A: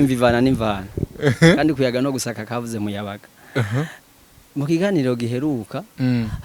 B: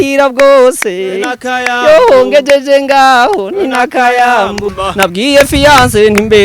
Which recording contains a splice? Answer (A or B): B